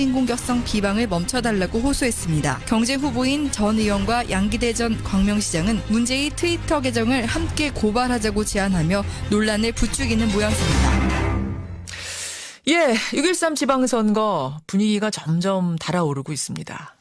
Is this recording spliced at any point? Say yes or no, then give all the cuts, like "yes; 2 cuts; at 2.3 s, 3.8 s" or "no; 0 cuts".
no; 0 cuts